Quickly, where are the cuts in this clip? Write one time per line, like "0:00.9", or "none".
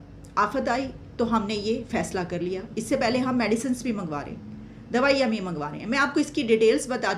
none